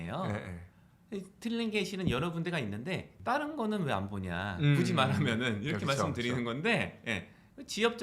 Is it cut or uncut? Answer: cut